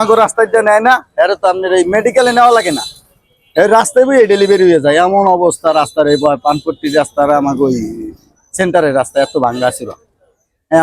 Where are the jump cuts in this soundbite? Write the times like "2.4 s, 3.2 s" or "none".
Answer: none